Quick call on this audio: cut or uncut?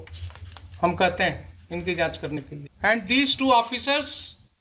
cut